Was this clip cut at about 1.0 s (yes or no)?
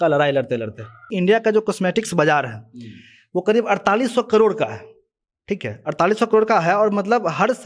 yes